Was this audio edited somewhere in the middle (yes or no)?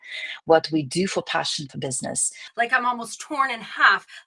yes